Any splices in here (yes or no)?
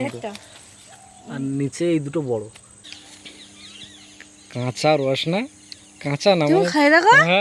yes